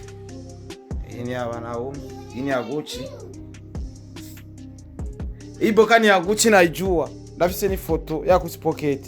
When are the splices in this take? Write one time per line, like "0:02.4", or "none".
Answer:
0:03.7
0:05.6